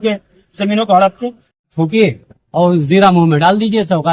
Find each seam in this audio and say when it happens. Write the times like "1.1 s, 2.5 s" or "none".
1.7 s